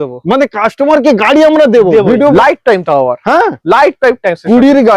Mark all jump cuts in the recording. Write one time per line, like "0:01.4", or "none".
0:02.3